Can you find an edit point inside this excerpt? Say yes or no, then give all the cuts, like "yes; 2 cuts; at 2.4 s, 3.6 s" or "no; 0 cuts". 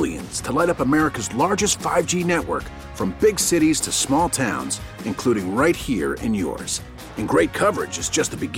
no; 0 cuts